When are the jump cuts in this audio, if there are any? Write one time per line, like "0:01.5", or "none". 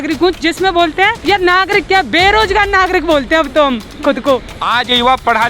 0:01.2
0:04.6